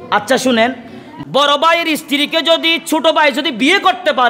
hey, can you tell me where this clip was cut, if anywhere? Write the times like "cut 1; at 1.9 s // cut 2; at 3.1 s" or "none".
cut 1; at 1.1 s